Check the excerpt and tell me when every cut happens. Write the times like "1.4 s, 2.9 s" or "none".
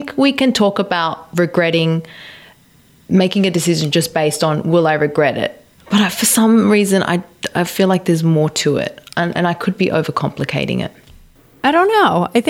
5.8 s, 11.0 s